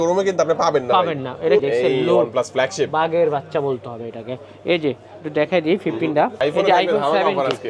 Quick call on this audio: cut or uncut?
cut